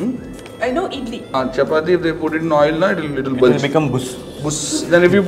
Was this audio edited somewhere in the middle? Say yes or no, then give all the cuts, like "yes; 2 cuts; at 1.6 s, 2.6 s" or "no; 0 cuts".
yes; 1 cut; at 1.2 s